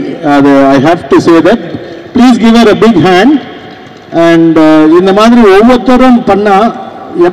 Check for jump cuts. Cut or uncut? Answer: uncut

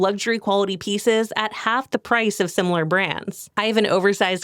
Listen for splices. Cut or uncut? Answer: cut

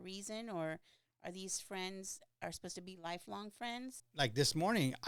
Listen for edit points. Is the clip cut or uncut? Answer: cut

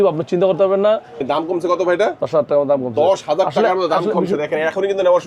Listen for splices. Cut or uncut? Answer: cut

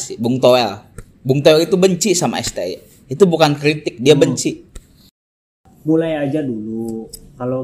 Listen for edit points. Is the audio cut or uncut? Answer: cut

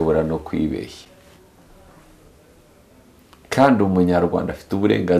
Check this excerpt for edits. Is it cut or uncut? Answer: uncut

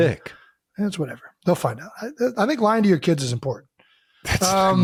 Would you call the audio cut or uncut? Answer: uncut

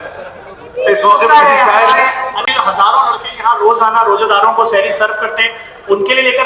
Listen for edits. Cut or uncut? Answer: cut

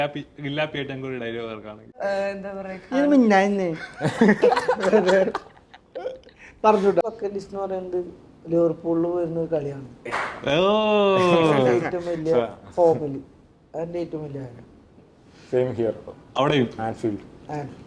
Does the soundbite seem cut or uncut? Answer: cut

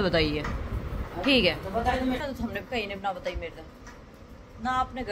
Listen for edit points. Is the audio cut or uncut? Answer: cut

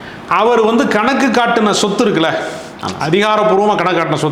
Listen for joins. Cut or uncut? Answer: uncut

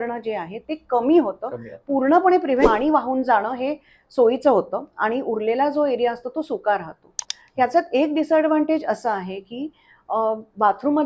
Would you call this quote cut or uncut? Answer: cut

